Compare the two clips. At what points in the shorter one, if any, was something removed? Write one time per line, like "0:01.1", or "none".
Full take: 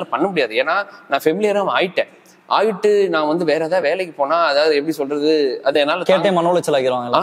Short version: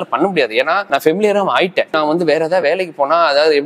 0:00.8
0:01.9

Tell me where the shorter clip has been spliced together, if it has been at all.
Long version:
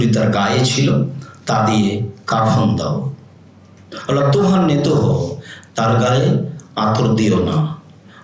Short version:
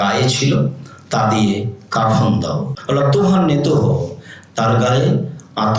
0:02.7

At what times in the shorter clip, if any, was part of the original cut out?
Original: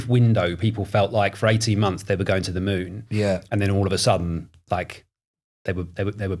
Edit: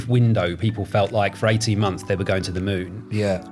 none

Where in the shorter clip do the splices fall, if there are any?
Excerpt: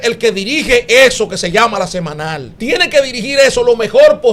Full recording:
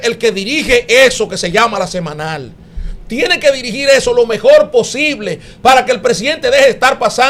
0:02.5

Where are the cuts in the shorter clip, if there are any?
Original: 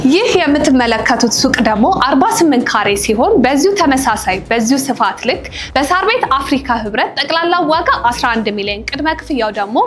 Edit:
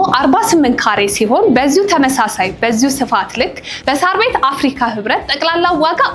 none

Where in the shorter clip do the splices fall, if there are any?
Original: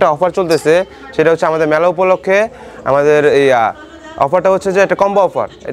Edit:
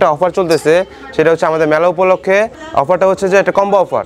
0:02.6

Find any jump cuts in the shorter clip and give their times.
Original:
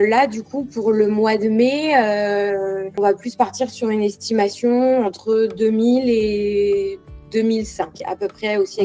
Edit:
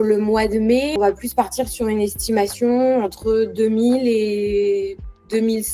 0:00.9

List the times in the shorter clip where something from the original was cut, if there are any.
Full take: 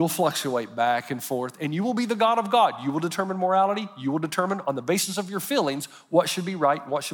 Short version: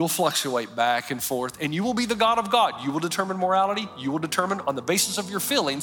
none

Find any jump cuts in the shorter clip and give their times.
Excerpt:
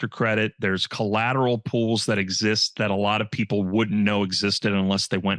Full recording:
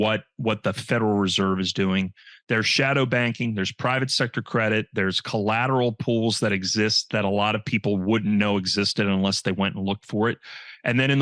none

